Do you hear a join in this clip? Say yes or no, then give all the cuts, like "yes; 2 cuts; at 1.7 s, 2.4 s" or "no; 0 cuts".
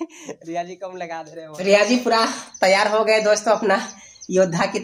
yes; 1 cut; at 1.4 s